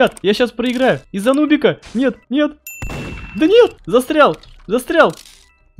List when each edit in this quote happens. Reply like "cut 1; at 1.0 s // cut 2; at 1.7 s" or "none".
cut 1; at 1.1 s // cut 2; at 2.2 s // cut 3; at 3.8 s